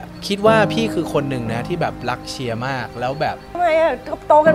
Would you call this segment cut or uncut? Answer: cut